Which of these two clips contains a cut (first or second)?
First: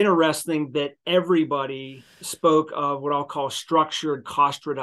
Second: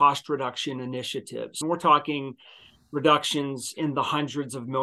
second